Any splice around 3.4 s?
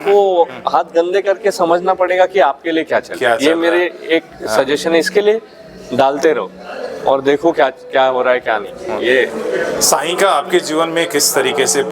no; 0 cuts

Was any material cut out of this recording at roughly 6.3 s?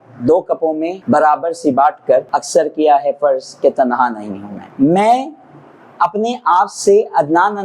no; 3 cuts; at 0.9 s, 2.3 s, 4.6 s

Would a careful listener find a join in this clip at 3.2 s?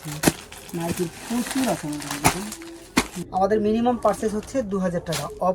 yes; 1 cut; at 3.2 s

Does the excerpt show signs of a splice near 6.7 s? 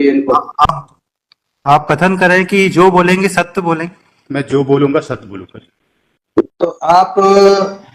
no; 0 cuts

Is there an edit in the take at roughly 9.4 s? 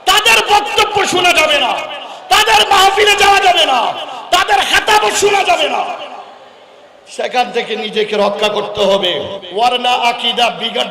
yes; 1 cut; at 9.4 s

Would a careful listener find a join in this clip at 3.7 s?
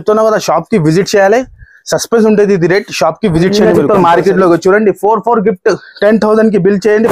yes; 1 cut; at 3.7 s

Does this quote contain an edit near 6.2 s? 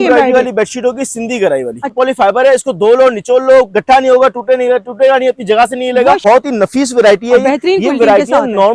yes; 2 cuts; at 1.9 s, 6.2 s

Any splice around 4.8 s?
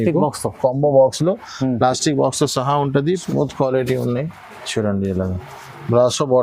no; 1 cut; at 3.2 s

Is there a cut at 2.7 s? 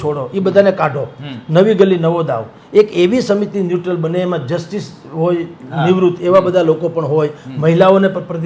no; 0 cuts

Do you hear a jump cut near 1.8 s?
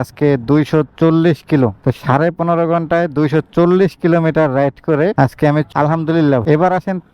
yes; 2 cuts; at 1.8 s, 5.7 s

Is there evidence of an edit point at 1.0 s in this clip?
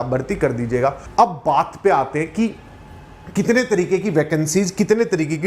yes; 1 cut; at 1.0 s

